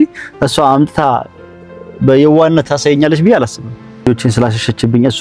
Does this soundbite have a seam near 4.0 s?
yes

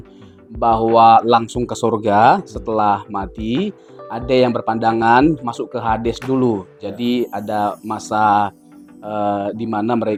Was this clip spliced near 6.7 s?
no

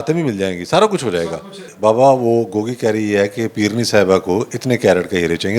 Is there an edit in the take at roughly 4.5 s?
no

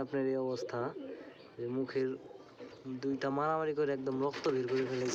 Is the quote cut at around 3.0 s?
no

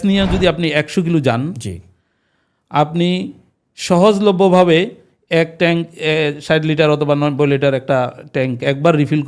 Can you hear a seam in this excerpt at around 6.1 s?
no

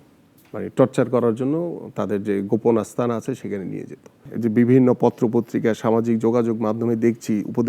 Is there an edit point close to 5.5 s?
no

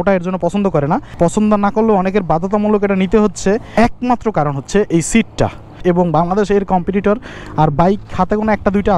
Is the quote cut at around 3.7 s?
yes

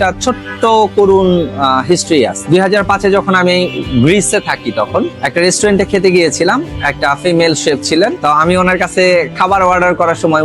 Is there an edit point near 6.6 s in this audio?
no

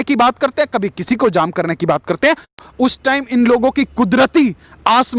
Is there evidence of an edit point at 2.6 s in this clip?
yes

